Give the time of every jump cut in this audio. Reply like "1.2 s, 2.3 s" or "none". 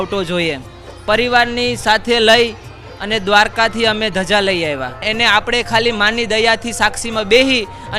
5.1 s